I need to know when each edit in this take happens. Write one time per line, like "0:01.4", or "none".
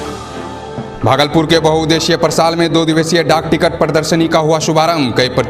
0:00.9